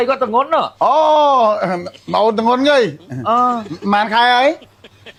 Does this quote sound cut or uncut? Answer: uncut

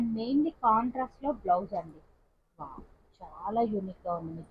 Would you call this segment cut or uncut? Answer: uncut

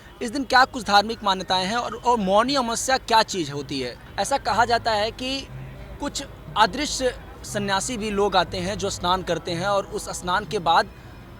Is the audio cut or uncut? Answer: cut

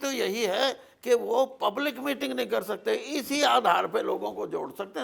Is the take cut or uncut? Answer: uncut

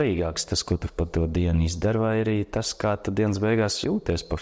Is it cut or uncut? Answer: uncut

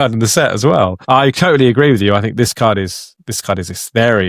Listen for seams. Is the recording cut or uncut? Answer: cut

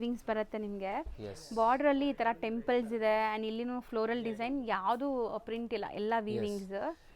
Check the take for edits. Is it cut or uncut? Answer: uncut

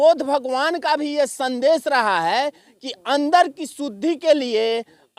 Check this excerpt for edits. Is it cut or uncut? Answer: uncut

